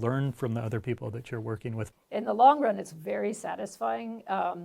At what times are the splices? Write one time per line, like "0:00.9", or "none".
0:01.9